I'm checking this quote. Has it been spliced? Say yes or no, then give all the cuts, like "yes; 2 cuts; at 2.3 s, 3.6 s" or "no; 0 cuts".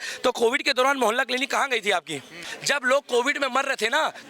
yes; 1 cut; at 2.4 s